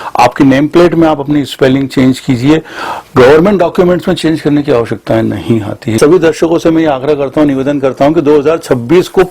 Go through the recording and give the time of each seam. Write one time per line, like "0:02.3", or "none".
0:06.0